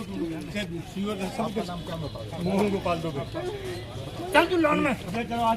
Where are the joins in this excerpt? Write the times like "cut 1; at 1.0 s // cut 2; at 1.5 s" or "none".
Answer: none